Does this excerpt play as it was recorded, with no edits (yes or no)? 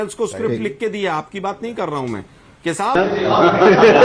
yes